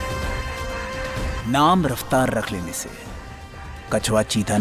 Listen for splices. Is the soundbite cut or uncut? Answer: uncut